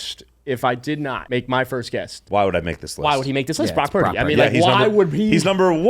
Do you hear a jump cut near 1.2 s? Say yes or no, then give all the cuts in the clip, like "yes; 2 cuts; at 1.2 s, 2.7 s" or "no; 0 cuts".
yes; 2 cuts; at 1.2 s, 2.2 s